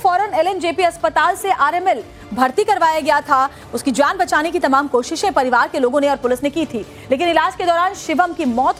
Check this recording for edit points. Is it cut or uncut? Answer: uncut